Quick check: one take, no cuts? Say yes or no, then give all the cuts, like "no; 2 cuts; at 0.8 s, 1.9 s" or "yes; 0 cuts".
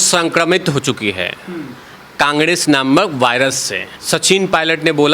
no; 1 cut; at 3.9 s